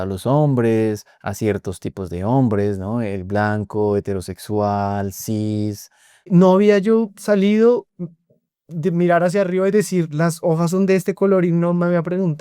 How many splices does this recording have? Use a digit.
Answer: 1